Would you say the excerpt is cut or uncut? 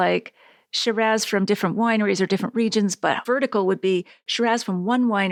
uncut